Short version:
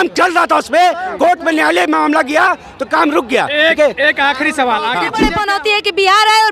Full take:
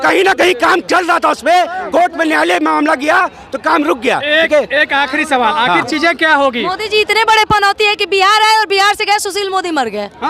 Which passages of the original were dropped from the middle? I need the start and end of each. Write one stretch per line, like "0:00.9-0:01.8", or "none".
0:05.9-0:07.3